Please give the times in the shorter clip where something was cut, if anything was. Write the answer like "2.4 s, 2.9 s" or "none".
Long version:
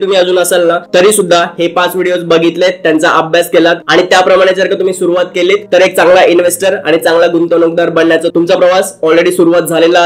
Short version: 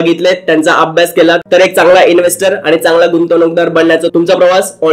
1.4 s